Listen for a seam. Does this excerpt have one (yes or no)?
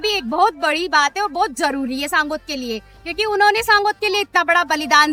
no